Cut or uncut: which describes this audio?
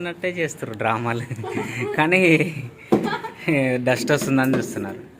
uncut